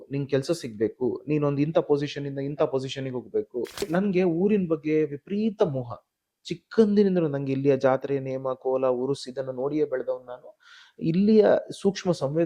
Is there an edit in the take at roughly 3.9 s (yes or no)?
yes